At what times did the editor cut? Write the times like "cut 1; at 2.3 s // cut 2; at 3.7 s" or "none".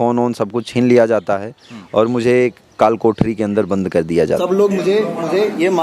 cut 1; at 4.4 s